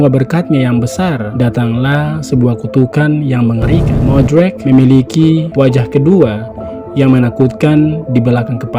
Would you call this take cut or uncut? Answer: cut